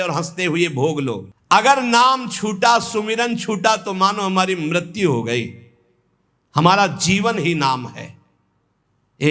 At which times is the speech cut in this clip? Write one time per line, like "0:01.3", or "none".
0:01.3